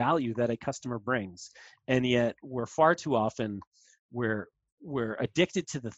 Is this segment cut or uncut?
uncut